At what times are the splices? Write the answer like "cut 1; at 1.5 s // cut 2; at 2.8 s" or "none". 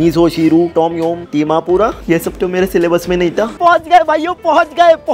cut 1; at 3.5 s